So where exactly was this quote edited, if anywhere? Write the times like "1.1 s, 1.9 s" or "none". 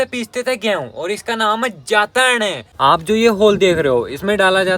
2.6 s